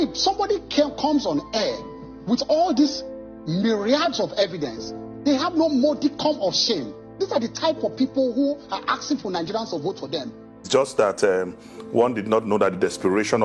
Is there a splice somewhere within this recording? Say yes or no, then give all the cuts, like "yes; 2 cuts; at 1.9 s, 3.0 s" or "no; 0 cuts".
yes; 1 cut; at 10.7 s